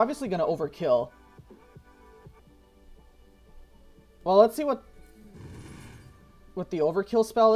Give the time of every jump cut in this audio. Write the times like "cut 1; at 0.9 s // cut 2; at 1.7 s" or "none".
cut 1; at 2.4 s

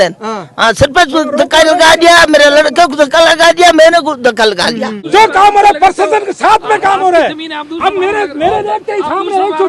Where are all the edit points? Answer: cut 1; at 4.9 s

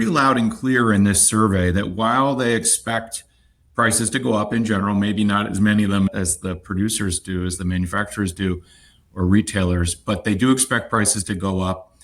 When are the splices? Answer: none

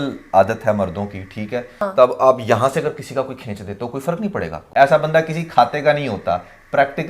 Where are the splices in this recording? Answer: cut 1; at 1.8 s // cut 2; at 4.6 s

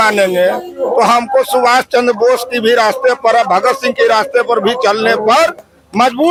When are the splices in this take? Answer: none

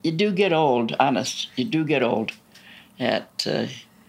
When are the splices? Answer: none

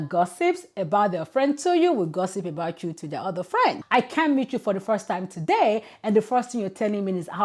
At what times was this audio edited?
cut 1; at 3.8 s

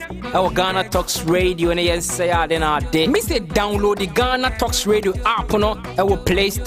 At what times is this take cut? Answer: none

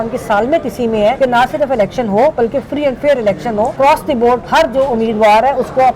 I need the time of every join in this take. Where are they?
cut 1; at 1.2 s // cut 2; at 4.1 s

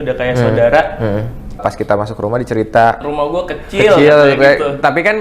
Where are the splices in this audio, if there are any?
cut 1; at 1.6 s // cut 2; at 3.0 s

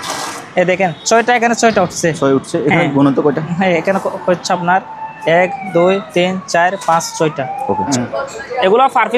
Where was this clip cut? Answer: cut 1; at 7.9 s

